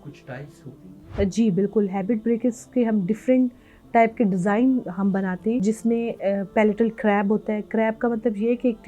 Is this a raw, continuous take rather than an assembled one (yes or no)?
no